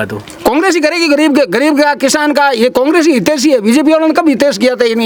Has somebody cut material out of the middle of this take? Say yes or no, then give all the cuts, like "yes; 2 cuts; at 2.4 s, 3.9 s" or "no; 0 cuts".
no; 0 cuts